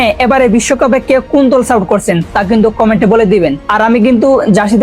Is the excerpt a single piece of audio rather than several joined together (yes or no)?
yes